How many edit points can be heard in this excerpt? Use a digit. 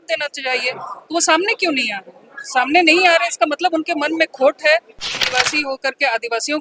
1